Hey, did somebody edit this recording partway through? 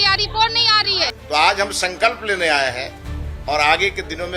yes; 1 cut; at 1.1 s

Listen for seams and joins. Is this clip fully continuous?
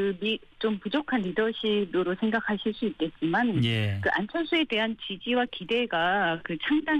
yes; 0 cuts

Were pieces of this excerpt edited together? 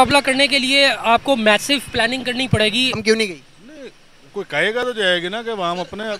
yes; 1 cut; at 3.0 s

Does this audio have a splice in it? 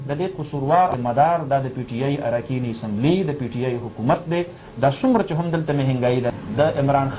yes; 2 cuts; at 1.0 s, 6.3 s

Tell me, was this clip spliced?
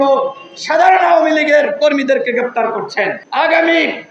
yes; 1 cut; at 3.2 s

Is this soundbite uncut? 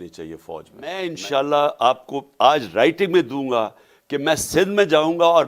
no; 1 cut; at 1.0 s

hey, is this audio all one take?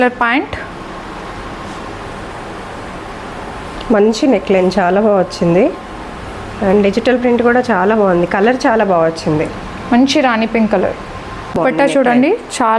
no; 1 cut; at 11.6 s

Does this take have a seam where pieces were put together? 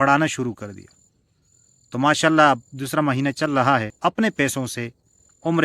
yes; 1 cut; at 3.9 s

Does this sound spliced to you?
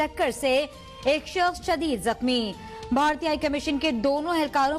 no; 0 cuts

